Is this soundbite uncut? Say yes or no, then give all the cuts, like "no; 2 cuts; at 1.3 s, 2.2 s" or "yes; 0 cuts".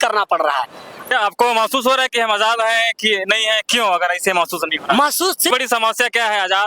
no; 2 cuts; at 1.1 s, 5.5 s